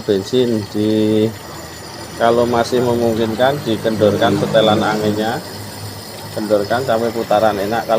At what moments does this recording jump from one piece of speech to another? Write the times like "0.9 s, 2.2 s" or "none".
none